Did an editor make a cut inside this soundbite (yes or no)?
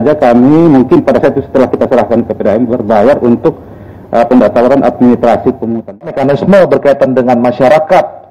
yes